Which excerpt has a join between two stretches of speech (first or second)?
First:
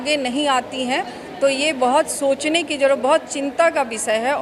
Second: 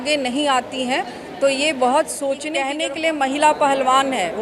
second